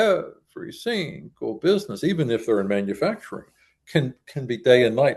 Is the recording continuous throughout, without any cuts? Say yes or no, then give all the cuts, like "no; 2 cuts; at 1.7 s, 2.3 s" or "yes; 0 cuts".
yes; 0 cuts